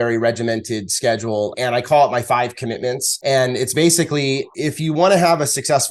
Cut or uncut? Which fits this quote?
cut